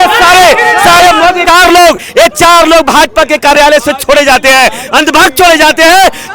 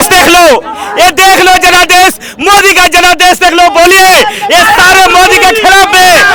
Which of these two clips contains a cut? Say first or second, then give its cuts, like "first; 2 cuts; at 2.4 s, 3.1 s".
first; 1 cut; at 1.4 s